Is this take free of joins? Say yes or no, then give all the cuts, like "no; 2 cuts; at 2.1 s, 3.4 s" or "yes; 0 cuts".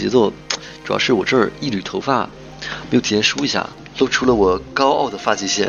no; 1 cut; at 3.8 s